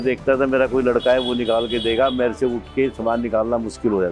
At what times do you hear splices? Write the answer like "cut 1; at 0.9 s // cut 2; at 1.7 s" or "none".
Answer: none